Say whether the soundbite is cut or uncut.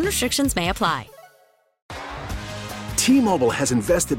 cut